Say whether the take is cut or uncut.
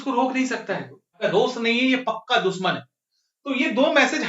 cut